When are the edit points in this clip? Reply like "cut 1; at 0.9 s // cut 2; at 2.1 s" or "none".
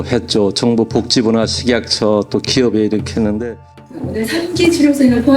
cut 1; at 4.1 s